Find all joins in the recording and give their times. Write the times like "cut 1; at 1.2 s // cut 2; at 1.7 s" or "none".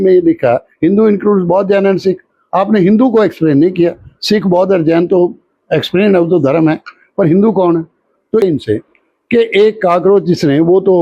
cut 1; at 8.4 s